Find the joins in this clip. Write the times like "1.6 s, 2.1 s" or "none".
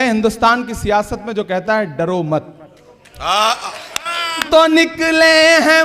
4.5 s